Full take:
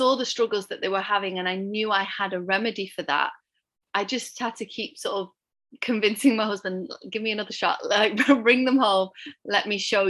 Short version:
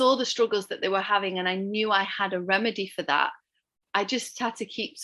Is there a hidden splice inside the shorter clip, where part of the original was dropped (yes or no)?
no